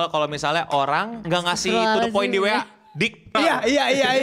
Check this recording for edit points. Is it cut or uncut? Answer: cut